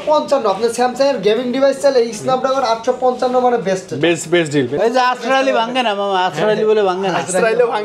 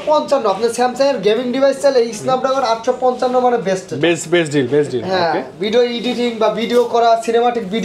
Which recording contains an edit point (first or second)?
first